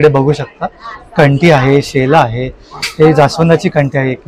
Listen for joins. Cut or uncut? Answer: uncut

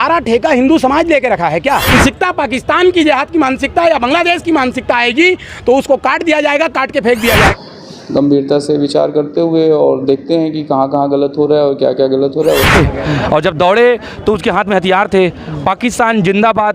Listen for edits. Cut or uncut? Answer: cut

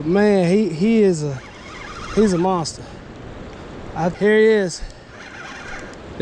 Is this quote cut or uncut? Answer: cut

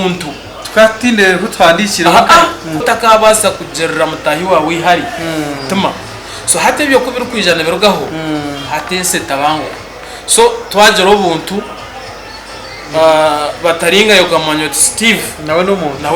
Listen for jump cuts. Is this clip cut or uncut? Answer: cut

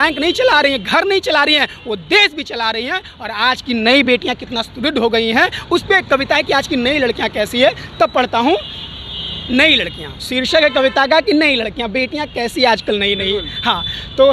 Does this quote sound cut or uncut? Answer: uncut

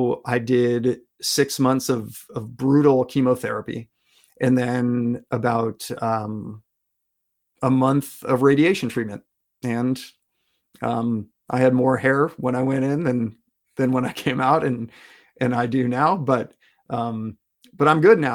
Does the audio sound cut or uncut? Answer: uncut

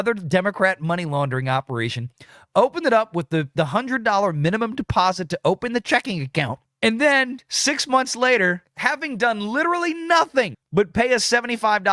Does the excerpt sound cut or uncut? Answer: uncut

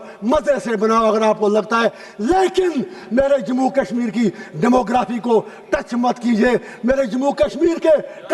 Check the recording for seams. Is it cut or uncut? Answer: uncut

